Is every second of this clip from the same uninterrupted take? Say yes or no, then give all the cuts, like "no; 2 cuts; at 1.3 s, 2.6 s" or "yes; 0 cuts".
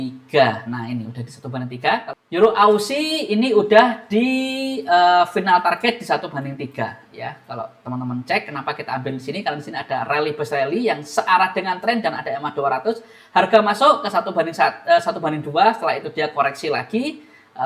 no; 1 cut; at 2.1 s